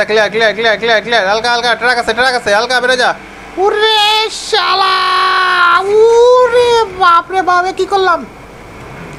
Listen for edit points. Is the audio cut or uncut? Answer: uncut